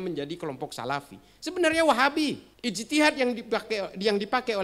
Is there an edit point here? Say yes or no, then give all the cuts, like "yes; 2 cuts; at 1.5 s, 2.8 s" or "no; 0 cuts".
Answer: yes; 1 cut; at 2.5 s